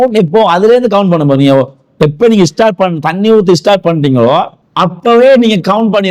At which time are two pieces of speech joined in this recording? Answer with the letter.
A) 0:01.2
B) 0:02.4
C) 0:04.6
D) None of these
C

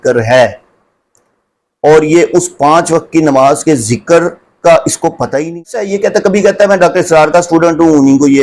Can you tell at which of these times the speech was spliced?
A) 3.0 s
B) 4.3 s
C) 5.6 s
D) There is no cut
C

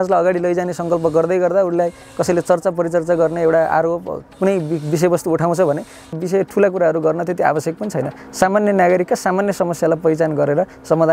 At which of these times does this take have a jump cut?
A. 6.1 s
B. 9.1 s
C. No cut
A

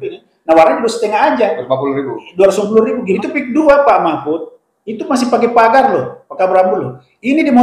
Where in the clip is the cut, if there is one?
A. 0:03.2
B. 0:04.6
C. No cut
A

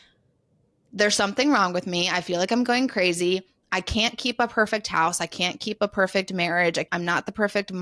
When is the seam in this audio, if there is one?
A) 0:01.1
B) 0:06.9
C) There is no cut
B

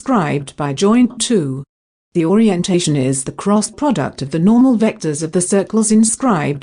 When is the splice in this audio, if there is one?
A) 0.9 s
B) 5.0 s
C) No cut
A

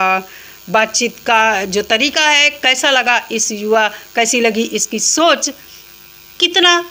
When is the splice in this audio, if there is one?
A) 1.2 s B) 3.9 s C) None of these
C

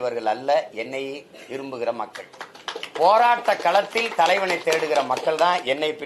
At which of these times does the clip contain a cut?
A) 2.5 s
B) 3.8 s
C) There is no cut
C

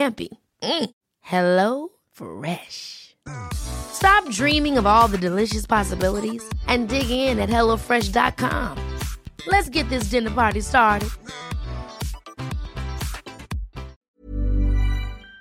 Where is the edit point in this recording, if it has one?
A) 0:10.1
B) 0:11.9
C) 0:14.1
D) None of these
C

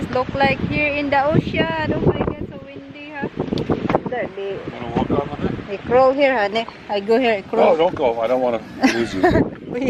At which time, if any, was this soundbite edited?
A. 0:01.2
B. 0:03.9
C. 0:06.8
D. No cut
B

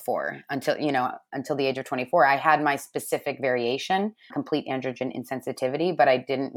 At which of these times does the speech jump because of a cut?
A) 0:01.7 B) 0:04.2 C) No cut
B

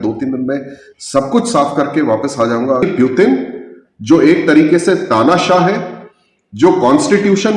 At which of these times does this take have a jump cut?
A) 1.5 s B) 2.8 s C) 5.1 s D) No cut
B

